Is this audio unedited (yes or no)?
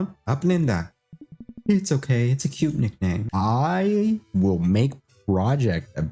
no